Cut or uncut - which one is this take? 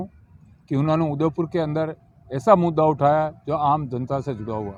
uncut